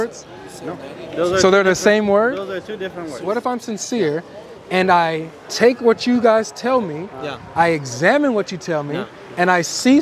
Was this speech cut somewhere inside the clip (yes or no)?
yes